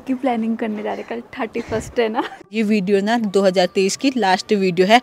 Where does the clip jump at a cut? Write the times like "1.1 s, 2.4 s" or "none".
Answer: 2.5 s